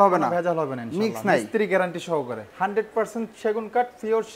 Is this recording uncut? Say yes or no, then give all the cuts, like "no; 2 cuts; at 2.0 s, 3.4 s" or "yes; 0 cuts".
no; 1 cut; at 2.4 s